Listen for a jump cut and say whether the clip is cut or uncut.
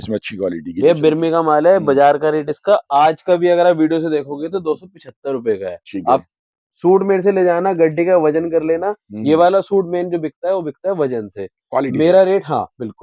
uncut